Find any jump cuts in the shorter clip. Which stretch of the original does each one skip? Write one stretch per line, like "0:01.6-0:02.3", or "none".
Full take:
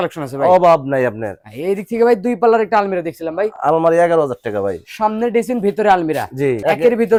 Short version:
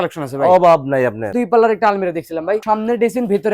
0:01.3-0:02.2
0:03.5-0:04.9